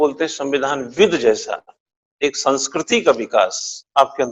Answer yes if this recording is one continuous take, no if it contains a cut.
yes